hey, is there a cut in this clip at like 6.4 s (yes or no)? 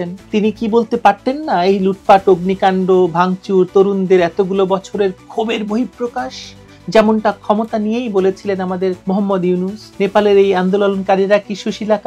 no